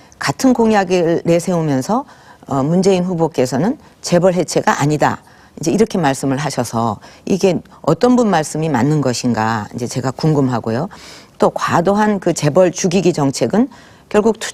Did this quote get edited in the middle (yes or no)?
no